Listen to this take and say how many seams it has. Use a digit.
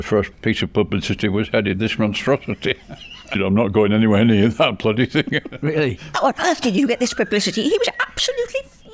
2